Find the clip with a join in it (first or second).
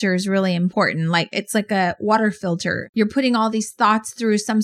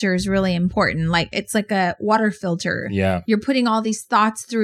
first